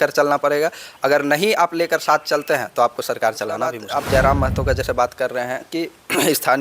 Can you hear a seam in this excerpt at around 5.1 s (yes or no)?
no